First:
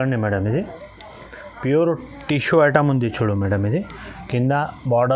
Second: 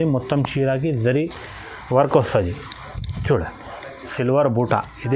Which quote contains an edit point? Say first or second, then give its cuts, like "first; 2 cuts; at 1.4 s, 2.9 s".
second; 1 cut; at 4.1 s